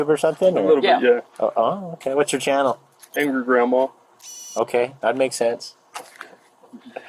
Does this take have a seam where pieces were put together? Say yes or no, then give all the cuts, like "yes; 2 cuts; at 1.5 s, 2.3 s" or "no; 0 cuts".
no; 0 cuts